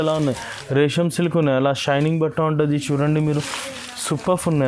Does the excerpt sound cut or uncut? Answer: uncut